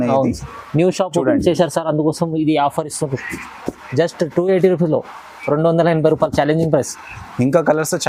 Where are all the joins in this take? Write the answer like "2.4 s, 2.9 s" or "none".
none